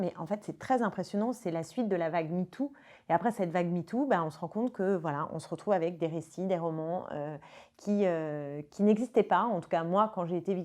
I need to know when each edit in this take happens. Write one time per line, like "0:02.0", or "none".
none